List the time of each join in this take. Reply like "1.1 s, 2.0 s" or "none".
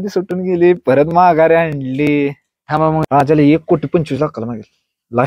3.1 s